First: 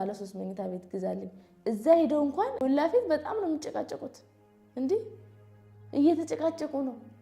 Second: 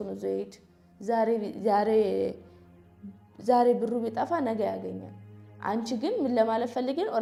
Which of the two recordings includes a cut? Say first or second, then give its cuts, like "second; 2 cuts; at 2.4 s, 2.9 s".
first; 1 cut; at 2.6 s